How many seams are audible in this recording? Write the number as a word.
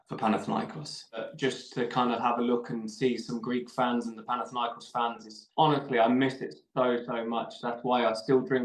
one